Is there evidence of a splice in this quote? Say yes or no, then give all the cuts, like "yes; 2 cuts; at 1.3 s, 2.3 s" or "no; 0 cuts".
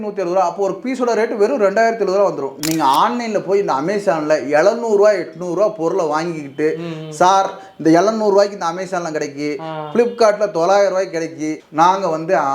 yes; 2 cuts; at 2.5 s, 11.6 s